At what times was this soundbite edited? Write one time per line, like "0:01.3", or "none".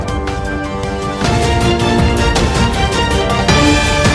none

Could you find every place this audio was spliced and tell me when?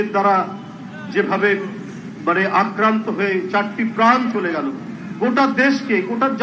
none

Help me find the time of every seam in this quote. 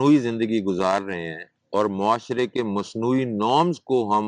none

